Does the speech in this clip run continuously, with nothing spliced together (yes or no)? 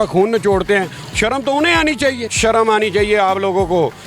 no